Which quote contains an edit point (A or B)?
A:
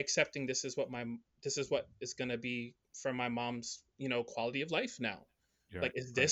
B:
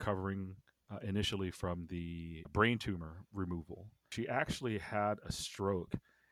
B